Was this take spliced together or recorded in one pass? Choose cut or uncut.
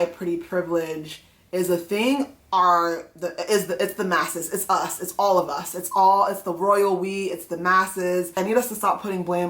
cut